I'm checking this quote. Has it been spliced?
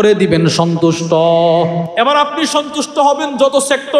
yes; 1 cut; at 1.8 s

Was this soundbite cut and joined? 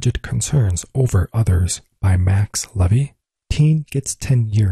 yes; 1 cut; at 3.2 s

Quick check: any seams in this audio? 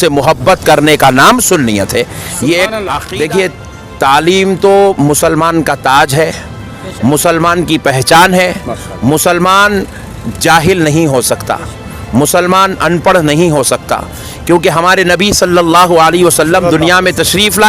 yes; 1 cut; at 3.0 s

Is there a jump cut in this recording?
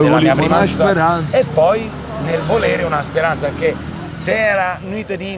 no; 0 cuts

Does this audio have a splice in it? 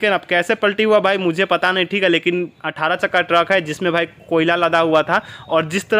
no; 0 cuts

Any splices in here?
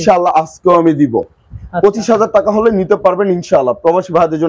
no; 0 cuts

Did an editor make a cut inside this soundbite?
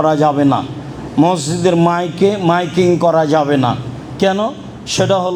no; 0 cuts

